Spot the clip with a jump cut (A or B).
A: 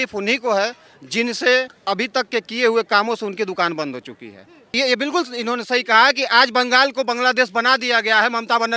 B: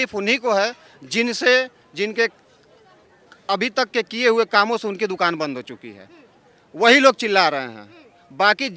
A